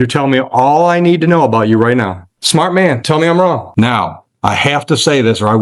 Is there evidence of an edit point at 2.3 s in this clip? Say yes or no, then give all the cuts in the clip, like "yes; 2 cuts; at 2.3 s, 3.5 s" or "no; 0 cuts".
yes; 2 cuts; at 2.3 s, 3.7 s